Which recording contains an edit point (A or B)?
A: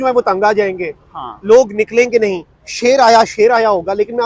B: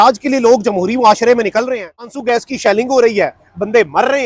B